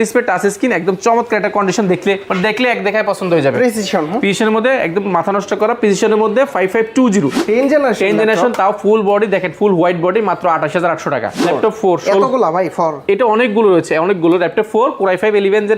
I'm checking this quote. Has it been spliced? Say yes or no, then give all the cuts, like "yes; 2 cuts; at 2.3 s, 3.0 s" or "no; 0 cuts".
yes; 2 cuts; at 7.4 s, 11.4 s